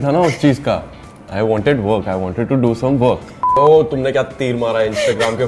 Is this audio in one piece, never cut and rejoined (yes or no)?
no